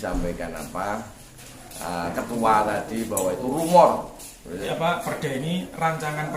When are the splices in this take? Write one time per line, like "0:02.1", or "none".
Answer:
0:04.6